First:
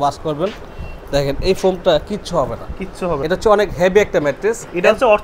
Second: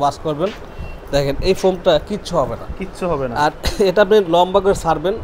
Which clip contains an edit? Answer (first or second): first